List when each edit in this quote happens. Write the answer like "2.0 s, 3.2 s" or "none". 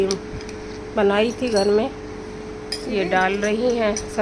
none